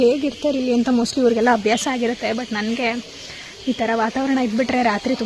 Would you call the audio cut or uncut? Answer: uncut